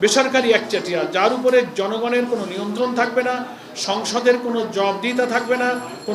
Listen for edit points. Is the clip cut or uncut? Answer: uncut